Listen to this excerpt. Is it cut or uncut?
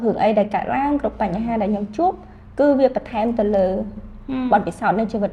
uncut